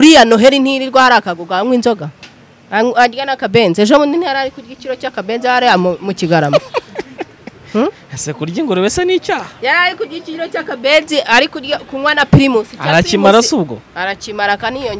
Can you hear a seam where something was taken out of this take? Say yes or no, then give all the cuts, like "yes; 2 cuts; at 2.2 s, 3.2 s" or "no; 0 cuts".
no; 0 cuts